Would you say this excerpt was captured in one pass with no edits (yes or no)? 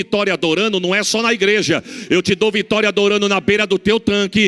yes